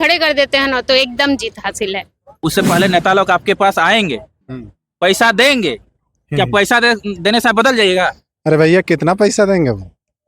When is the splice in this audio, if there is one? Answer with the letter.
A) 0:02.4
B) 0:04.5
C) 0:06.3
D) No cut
A